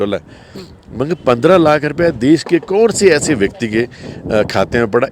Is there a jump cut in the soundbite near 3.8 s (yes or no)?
no